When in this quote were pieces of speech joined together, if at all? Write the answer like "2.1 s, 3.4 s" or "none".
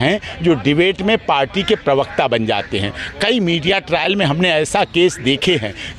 none